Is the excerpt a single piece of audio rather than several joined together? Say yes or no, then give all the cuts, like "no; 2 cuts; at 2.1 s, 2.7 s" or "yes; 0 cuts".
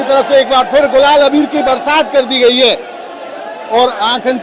yes; 0 cuts